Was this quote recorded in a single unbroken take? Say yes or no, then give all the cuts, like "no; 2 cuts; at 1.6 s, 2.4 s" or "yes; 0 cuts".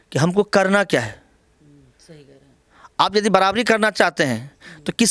yes; 0 cuts